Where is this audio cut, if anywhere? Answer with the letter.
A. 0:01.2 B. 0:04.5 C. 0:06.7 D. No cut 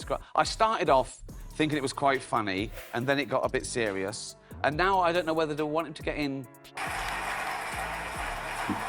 C